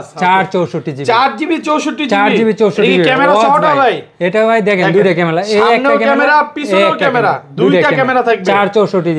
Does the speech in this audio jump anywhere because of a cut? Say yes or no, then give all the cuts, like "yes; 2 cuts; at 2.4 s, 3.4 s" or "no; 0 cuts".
no; 0 cuts